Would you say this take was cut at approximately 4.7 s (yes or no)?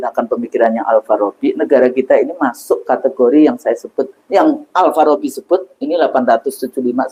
no